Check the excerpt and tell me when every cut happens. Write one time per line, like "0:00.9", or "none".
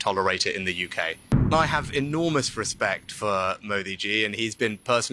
0:01.5